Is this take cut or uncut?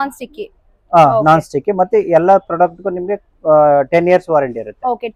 uncut